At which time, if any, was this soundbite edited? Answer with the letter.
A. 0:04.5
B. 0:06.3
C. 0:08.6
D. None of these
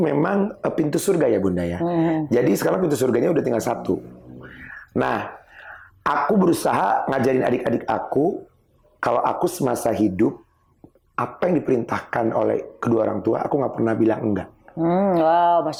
D